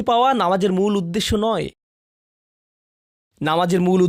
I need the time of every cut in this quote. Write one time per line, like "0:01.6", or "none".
none